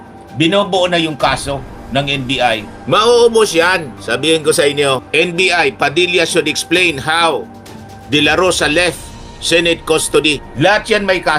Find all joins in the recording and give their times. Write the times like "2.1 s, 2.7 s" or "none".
none